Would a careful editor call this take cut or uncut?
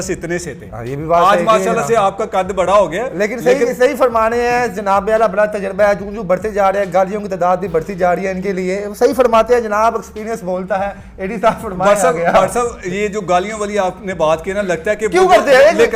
uncut